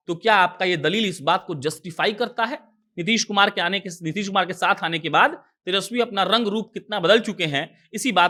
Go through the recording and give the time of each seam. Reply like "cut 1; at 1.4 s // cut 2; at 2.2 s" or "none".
none